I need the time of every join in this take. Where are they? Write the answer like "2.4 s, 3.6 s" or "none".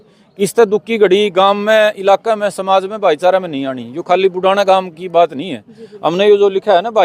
none